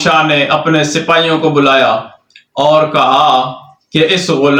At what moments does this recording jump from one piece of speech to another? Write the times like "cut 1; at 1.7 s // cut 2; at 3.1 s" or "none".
none

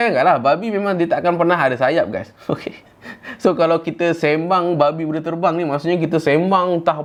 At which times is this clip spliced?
none

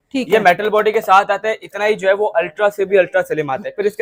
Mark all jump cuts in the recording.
none

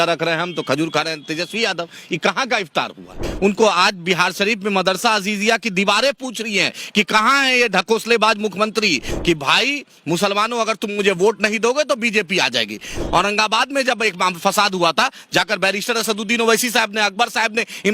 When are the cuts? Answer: cut 1; at 3.2 s // cut 2; at 9.1 s // cut 3; at 13.0 s

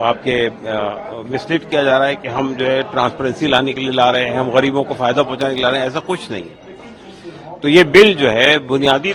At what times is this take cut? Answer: none

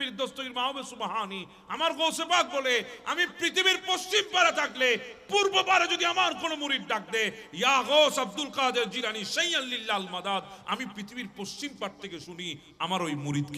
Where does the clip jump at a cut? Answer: none

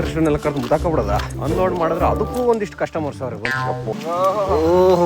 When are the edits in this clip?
cut 1; at 3.9 s

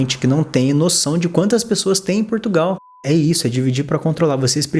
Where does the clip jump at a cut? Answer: cut 1; at 2.8 s

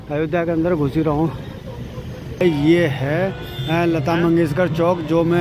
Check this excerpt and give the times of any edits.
cut 1; at 2.4 s

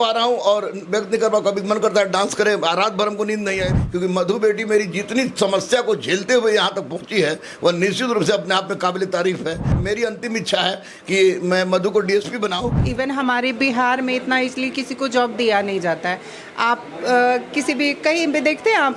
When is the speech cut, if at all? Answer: cut 1; at 3.7 s // cut 2; at 9.8 s // cut 3; at 12.8 s

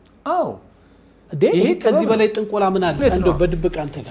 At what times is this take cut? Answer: cut 1; at 3.0 s

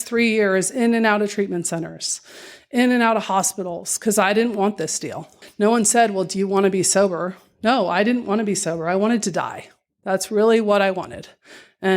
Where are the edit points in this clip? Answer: cut 1; at 5.4 s

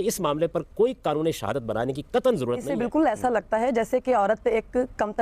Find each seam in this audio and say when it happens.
cut 1; at 2.7 s

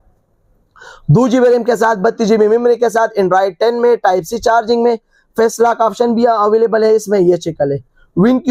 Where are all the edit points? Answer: none

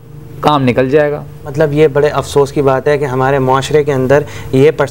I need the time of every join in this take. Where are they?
none

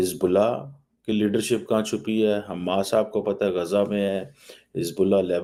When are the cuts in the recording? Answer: none

